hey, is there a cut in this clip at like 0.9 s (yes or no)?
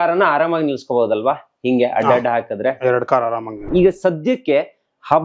no